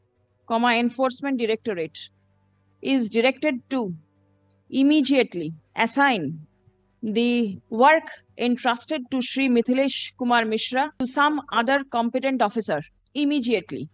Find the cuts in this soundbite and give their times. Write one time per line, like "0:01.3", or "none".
0:05.6
0:07.6
0:10.9
0:13.0